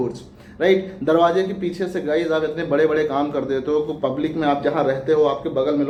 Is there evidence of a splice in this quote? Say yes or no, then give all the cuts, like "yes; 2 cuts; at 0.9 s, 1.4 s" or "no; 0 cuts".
no; 0 cuts